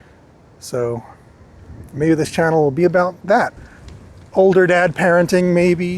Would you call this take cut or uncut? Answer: cut